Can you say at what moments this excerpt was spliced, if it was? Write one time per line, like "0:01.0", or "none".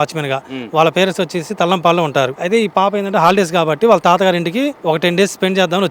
0:02.4
0:04.8